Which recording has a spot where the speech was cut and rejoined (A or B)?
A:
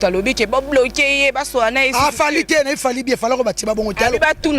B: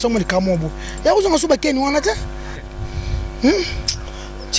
B